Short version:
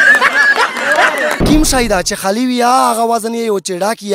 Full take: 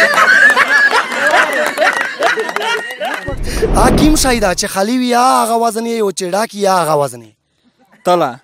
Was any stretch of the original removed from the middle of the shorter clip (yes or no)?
yes